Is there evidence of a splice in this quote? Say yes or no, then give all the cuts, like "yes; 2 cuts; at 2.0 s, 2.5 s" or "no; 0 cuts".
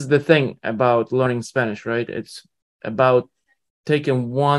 yes; 1 cut; at 1.3 s